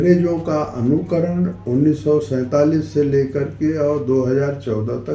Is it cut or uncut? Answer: cut